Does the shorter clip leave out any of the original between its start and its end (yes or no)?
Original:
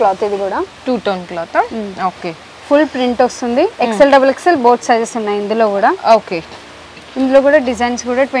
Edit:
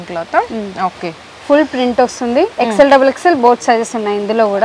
no